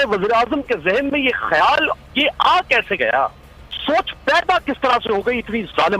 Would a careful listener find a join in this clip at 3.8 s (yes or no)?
yes